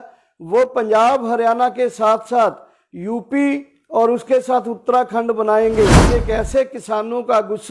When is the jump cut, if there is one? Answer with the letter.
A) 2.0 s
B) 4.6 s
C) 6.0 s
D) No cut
C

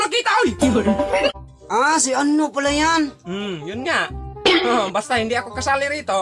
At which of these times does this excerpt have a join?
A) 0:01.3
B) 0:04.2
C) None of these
A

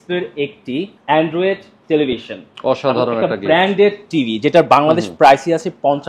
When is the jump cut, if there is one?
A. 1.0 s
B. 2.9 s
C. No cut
A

